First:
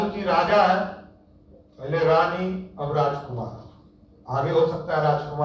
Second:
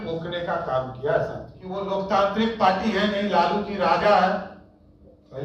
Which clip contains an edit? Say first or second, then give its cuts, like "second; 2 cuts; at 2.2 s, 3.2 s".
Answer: second; 1 cut; at 1.8 s